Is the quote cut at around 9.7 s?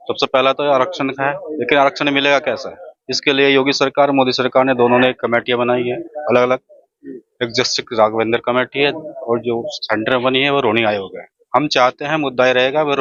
no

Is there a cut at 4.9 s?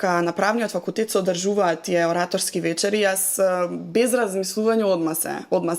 no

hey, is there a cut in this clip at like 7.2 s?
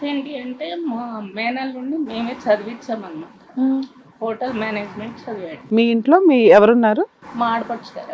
yes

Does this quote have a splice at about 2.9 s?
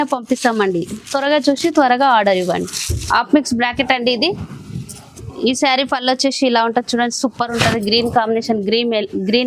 yes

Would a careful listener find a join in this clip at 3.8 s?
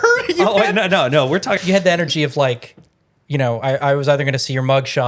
no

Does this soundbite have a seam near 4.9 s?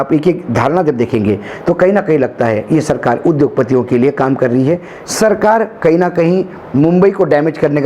yes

